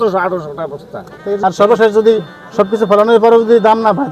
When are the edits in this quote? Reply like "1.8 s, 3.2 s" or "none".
1.3 s

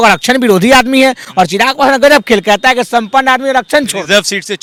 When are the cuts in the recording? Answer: none

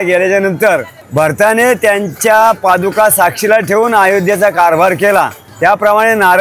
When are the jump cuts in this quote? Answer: 1.0 s, 5.4 s

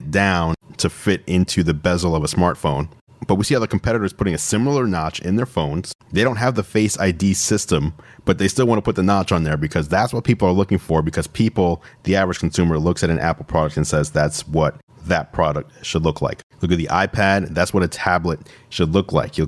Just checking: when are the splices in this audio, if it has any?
none

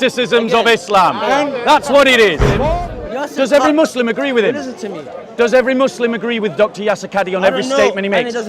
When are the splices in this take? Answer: 2.7 s

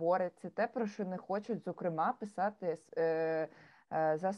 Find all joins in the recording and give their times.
none

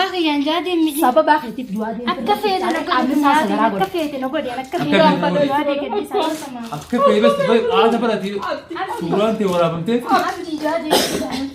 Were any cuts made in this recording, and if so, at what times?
none

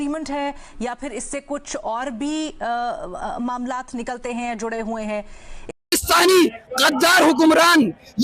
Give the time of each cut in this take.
5.7 s

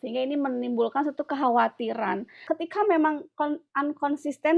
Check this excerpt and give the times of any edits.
2.4 s

